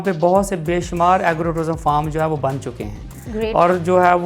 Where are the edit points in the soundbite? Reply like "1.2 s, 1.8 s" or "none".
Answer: none